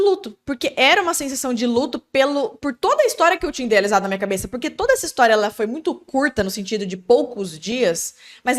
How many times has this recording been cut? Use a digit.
0